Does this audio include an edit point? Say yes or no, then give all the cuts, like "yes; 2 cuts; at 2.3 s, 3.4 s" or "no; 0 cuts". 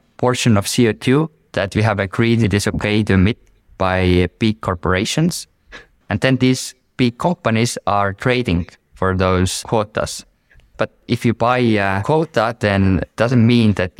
yes; 3 cuts; at 2.4 s, 5.9 s, 12.0 s